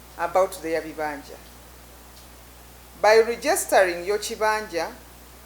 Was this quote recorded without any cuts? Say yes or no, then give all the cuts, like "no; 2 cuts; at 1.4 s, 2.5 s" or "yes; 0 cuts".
no; 1 cut; at 2.3 s